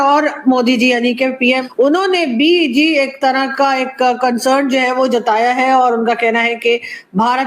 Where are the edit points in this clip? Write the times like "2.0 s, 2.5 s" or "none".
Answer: 1.6 s